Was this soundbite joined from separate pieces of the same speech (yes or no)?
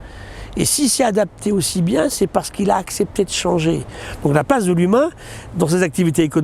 no